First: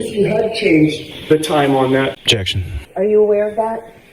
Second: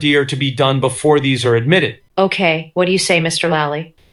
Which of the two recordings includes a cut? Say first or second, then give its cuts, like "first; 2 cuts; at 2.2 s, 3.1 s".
first; 2 cuts; at 1.1 s, 2.2 s